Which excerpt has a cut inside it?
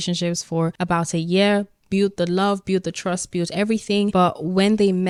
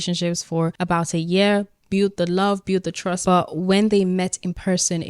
second; 1 cut; at 3.2 s

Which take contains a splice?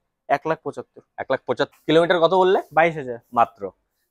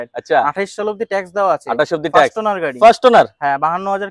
first; 1 cut; at 1.7 s

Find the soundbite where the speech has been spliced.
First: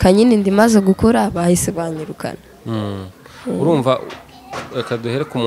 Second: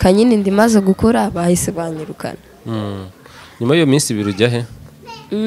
second; 1 cut; at 3.3 s

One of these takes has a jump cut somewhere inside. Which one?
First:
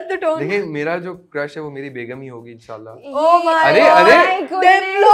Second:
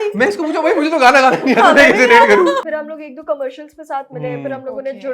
second; 1 cut; at 2.6 s

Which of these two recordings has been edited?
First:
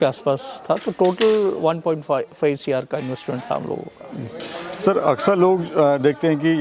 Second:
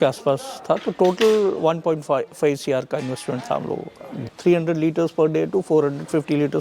second; 1 cut; at 4.3 s

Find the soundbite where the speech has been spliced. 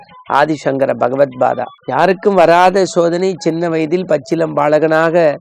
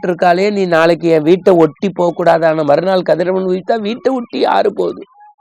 first; 1 cut; at 1.7 s

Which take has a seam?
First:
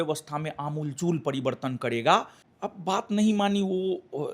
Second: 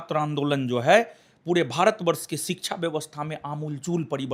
first; 1 cut; at 2.4 s

